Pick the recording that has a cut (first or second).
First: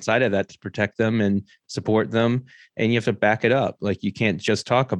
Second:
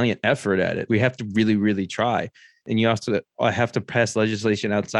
second